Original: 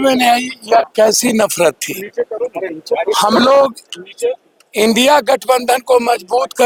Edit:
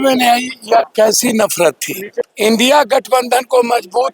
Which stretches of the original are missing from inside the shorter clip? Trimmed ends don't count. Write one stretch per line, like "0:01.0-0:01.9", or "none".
0:02.2-0:04.5